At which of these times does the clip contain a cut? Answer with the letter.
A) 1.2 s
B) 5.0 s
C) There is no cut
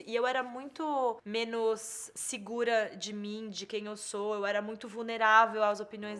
A